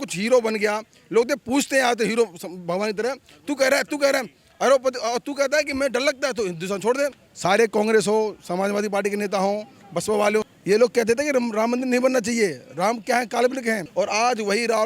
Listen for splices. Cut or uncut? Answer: cut